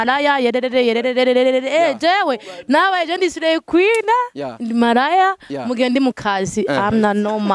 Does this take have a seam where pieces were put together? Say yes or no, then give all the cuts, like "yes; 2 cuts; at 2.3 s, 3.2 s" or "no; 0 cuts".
no; 0 cuts